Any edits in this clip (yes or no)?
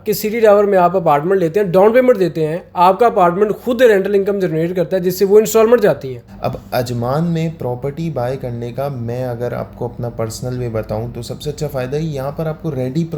yes